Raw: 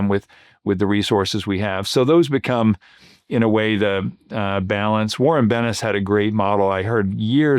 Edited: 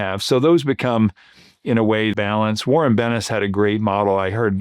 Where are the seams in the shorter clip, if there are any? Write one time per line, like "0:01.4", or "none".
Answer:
0:02.1